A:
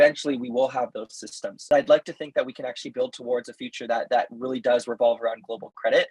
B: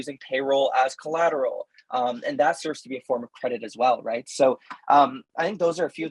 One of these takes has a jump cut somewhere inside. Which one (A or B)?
A